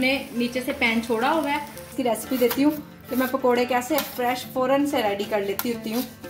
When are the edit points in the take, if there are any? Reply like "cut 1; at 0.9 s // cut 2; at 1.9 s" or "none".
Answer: cut 1; at 1.9 s